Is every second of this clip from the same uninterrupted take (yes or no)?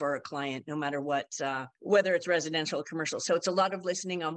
no